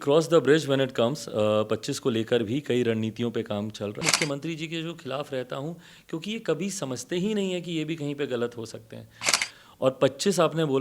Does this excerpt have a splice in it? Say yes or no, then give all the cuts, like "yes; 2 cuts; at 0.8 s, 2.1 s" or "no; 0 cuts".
yes; 2 cuts; at 4.0 s, 9.3 s